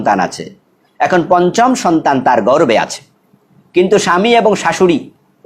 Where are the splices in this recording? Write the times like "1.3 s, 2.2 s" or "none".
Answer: none